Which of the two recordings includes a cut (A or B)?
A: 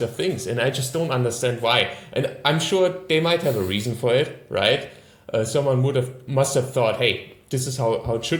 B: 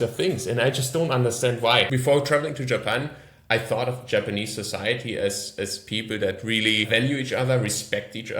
B